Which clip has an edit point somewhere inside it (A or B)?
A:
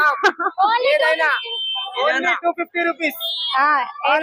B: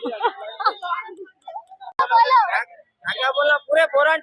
B